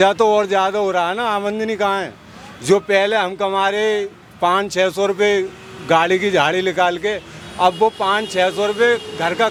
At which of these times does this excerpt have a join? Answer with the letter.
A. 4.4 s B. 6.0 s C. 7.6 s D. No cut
D